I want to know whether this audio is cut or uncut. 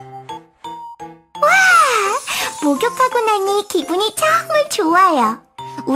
cut